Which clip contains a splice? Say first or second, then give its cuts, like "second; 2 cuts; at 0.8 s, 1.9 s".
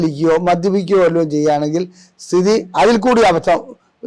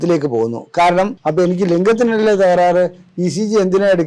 second; 1 cut; at 1.2 s